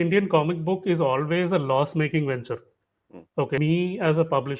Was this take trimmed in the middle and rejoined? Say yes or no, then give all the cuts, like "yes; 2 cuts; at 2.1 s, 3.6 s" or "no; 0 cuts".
yes; 1 cut; at 3.6 s